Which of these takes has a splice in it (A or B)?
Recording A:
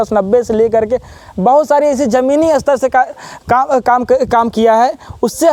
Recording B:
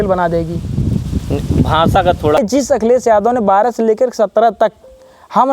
B